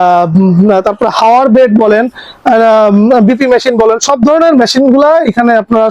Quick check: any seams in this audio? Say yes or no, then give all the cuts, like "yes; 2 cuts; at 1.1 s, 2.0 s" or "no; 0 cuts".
no; 0 cuts